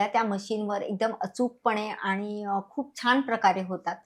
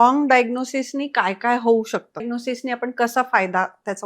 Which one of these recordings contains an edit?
second; 1 cut; at 2.3 s

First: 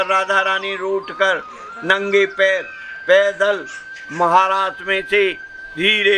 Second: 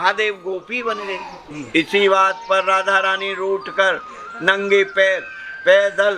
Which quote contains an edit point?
second; 1 cut; at 1.4 s

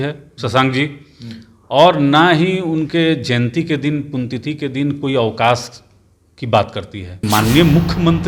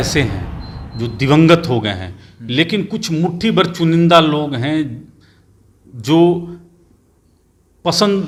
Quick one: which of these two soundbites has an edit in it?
first; 1 cut; at 7.2 s

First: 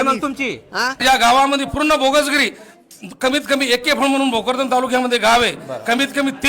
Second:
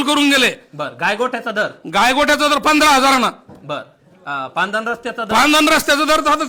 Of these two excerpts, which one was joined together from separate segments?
first; 1 cut; at 1.0 s

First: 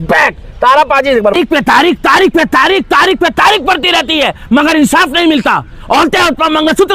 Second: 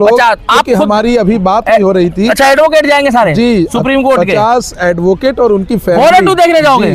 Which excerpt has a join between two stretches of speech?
first; 1 cut; at 1.3 s

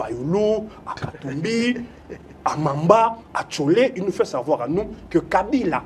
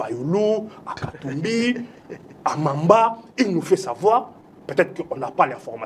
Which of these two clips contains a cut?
first; 1 cut; at 3.2 s

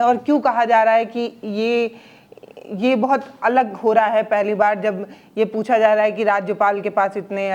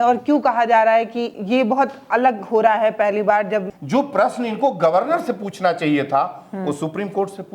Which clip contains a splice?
second; 2 cuts; at 1.3 s, 3.8 s

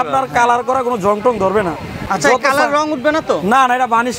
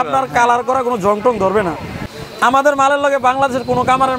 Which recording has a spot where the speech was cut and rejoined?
second; 1 cut; at 2.0 s

